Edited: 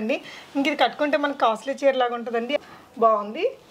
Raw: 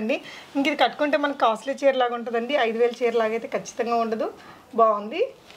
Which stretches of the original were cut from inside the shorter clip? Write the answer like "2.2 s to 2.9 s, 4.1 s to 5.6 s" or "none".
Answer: 2.6 s to 4.3 s

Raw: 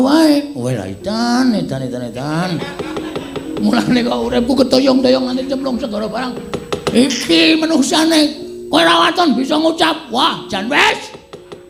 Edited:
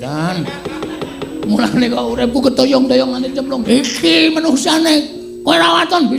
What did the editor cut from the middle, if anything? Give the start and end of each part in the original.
5.8 s to 6.9 s

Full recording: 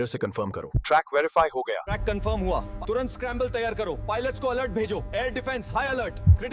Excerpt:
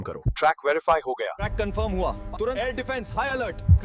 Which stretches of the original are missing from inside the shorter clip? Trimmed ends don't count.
3.0 s to 5.1 s

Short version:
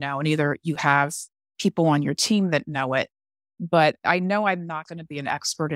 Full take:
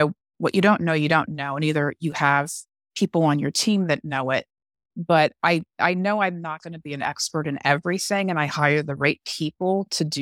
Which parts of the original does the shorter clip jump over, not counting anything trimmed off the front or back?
5.4 s to 5.7 s

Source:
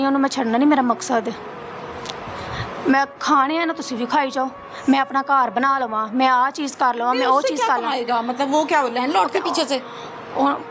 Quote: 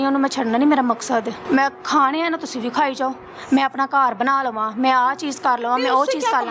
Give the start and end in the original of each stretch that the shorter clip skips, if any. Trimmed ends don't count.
1.4 s to 2.8 s

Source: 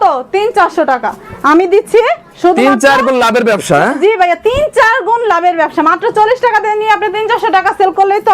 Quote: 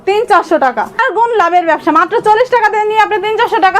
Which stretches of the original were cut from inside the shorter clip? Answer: 1.3 s to 5.0 s

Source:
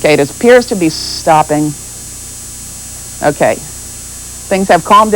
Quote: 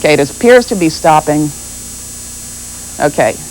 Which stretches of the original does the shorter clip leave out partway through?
1.0 s to 1.2 s

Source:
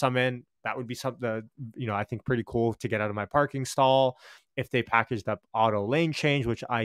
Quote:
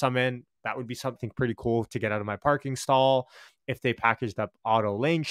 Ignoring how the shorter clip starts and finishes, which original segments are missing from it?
1.2 s to 2.1 s

